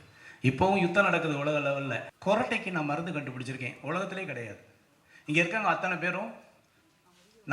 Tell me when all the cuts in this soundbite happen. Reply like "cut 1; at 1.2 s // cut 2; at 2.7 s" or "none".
cut 1; at 2.1 s